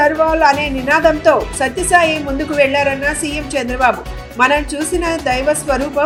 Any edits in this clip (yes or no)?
no